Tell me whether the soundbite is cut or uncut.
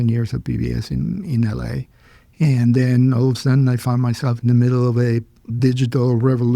cut